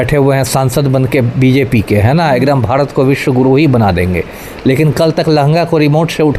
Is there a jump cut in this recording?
no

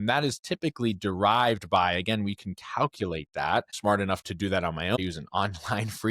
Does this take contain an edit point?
yes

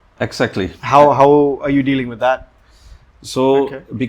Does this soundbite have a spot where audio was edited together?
yes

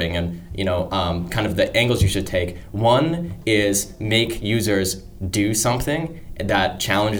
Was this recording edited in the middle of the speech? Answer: no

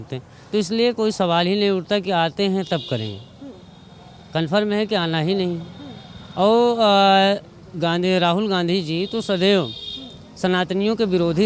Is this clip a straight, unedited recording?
yes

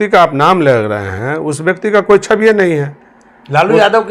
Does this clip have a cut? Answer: no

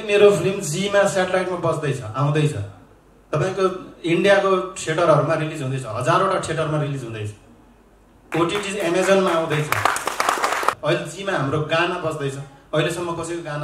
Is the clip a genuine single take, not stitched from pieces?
no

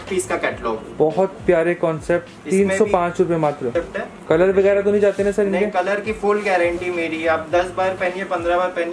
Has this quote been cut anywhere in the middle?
yes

